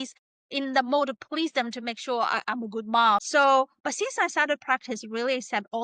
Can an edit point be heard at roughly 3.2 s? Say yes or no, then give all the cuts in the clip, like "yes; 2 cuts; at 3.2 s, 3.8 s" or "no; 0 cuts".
yes; 1 cut; at 3.2 s